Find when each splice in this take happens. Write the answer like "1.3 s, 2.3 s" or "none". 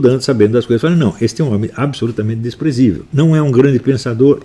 3.0 s